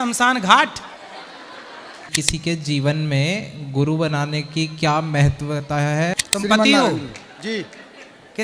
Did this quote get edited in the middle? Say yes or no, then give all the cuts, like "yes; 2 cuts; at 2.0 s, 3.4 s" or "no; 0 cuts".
yes; 2 cuts; at 2.1 s, 6.2 s